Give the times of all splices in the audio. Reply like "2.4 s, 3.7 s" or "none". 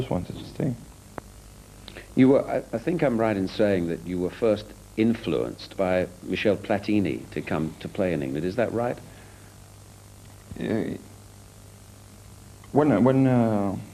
11.7 s